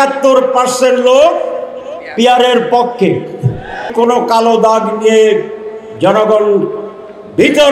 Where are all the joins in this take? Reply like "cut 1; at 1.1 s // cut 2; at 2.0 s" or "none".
cut 1; at 3.9 s